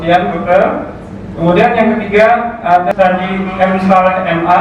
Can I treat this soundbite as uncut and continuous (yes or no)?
no